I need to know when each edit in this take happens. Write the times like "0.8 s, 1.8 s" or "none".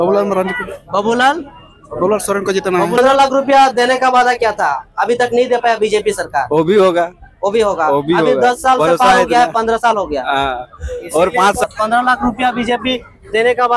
3.0 s, 11.6 s